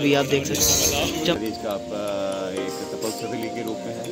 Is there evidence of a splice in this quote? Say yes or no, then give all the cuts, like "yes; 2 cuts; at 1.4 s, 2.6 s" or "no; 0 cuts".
yes; 1 cut; at 1.3 s